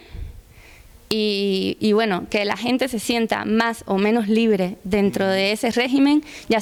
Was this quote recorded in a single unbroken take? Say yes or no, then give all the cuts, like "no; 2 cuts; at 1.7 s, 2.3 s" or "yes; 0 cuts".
yes; 0 cuts